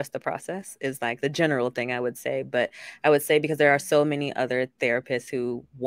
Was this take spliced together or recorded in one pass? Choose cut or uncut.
cut